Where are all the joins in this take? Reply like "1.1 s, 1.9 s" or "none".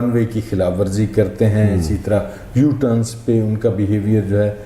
none